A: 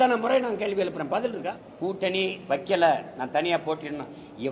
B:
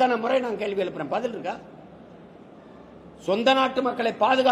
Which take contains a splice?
A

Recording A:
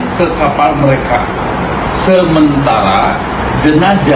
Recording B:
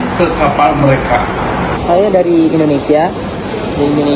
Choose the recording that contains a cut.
B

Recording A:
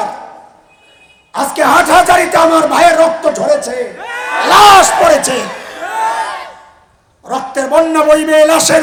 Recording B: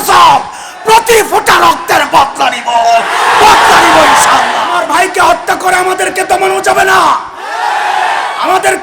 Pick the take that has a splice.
B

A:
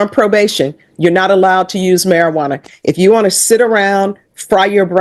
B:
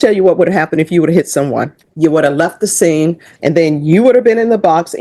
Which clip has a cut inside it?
B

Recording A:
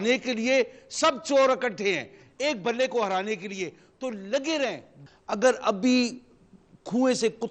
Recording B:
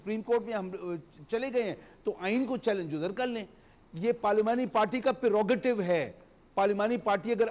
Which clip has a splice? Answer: A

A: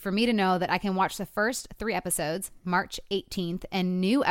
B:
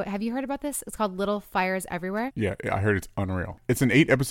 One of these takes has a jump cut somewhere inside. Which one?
A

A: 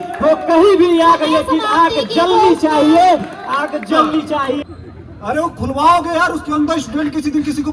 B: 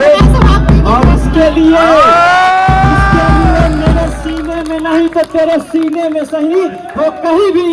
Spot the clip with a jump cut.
A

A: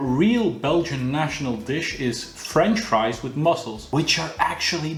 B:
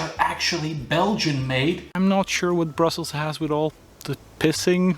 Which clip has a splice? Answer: B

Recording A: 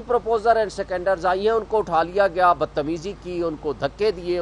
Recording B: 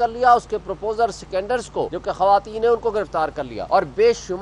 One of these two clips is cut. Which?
B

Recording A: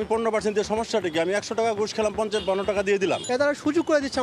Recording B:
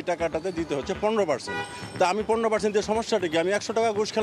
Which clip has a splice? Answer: A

